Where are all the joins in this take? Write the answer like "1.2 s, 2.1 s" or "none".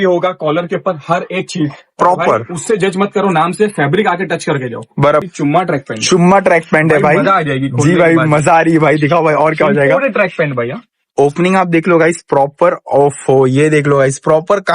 5.2 s